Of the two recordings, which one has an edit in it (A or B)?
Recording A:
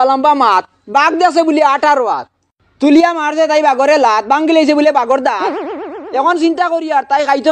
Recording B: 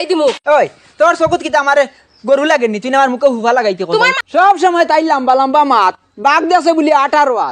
B